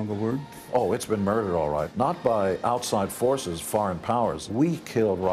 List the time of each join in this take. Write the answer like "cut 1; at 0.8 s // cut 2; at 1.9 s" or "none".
cut 1; at 1.9 s // cut 2; at 4.4 s